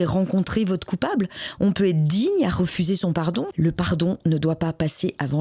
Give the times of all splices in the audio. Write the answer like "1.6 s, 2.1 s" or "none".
3.5 s